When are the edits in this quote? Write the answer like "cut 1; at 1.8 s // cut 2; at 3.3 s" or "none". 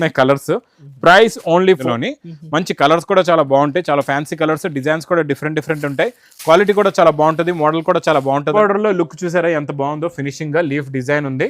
cut 1; at 1.8 s // cut 2; at 8.5 s